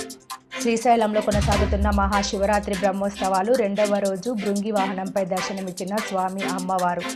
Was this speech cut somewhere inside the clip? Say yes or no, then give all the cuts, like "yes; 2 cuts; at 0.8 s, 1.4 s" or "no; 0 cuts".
no; 0 cuts